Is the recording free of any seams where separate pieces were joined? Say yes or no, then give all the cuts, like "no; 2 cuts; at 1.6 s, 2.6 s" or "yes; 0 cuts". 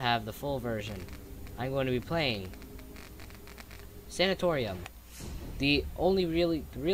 no; 1 cut; at 3.1 s